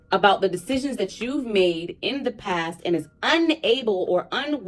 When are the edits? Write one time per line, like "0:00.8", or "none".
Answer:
none